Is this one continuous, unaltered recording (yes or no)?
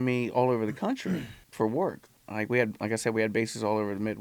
no